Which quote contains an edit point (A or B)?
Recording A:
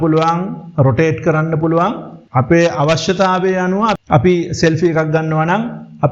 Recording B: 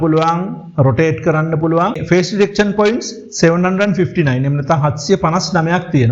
B